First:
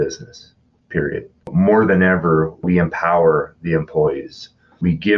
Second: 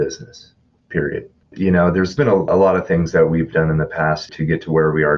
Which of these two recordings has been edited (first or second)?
first